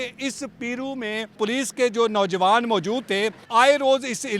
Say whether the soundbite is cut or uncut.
cut